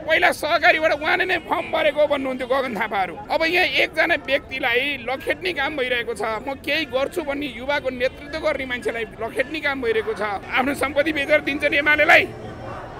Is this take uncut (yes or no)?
no